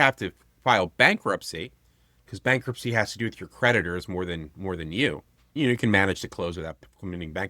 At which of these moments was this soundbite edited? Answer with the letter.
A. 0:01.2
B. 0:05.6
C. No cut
B